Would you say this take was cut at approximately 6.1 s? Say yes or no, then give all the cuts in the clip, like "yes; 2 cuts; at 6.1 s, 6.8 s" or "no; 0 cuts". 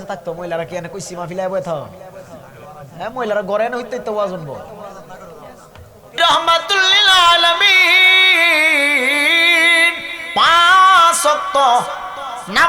yes; 1 cut; at 6.1 s